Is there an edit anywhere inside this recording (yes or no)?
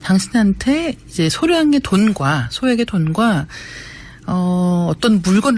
yes